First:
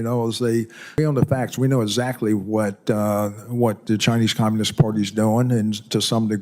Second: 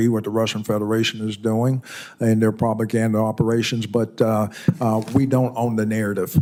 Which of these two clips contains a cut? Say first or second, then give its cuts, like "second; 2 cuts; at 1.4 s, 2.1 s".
first; 1 cut; at 1.0 s